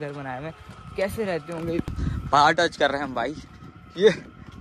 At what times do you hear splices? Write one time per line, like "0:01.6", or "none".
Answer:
0:01.9